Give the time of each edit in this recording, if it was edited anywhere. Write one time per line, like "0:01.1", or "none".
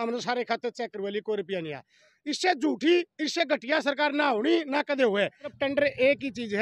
0:05.5